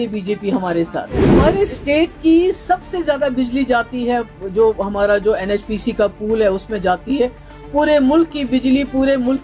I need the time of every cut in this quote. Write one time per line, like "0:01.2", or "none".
0:01.3